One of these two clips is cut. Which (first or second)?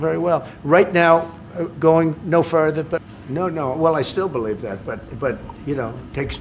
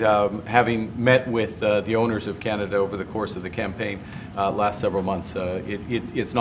first